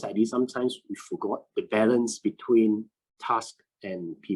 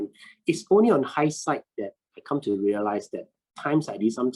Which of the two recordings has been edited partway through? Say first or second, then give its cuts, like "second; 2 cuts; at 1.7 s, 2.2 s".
first; 1 cut; at 1.5 s